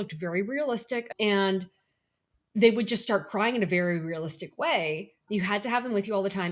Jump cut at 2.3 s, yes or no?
no